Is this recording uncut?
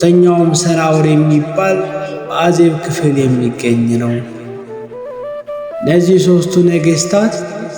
no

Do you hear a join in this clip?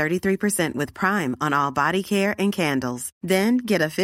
no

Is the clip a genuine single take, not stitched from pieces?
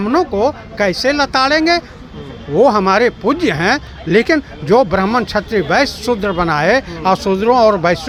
yes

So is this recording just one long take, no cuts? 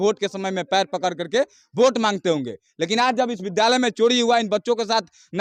yes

